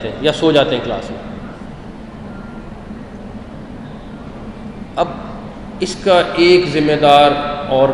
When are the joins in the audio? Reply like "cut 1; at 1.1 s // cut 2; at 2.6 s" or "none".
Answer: none